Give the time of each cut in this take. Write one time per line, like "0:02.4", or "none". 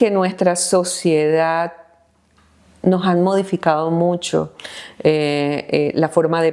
none

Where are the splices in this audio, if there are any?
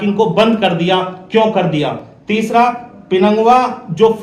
none

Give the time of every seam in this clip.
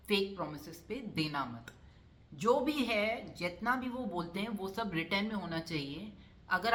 none

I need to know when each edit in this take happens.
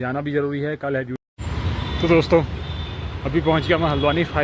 0:01.2

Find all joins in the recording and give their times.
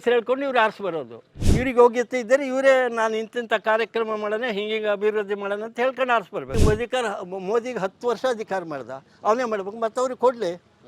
0:06.5

